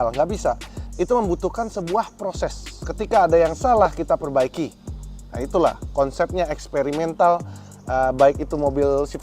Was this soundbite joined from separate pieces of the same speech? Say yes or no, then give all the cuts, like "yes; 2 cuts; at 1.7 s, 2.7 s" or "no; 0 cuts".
no; 0 cuts